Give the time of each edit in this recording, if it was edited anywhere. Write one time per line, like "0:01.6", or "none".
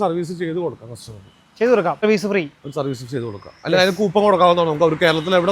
0:02.0